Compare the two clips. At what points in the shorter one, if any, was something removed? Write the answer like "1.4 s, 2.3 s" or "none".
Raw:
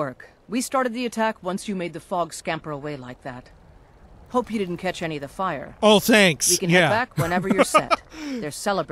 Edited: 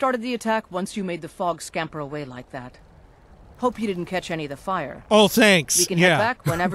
none